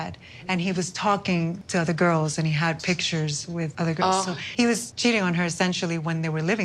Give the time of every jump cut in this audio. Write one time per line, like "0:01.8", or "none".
none